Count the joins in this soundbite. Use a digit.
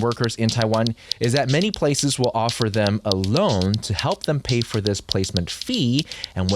1